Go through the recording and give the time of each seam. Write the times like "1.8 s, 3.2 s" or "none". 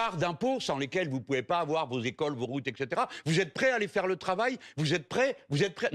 none